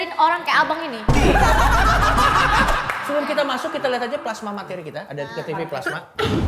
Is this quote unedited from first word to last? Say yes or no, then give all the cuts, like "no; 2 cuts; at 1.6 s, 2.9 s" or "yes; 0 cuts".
no; 1 cut; at 2.8 s